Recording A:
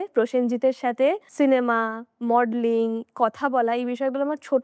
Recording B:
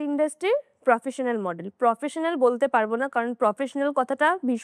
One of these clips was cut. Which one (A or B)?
A